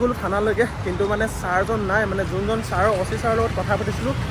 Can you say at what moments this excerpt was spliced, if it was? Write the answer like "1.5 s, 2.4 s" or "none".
none